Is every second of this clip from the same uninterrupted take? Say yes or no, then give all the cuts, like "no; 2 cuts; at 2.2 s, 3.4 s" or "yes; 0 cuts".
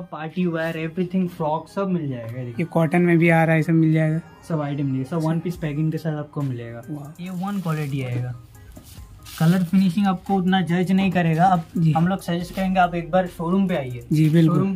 no; 1 cut; at 7.2 s